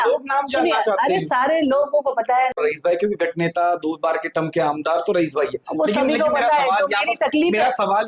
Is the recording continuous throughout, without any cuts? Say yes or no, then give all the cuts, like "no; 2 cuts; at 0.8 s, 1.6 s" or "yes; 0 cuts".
no; 1 cut; at 2.5 s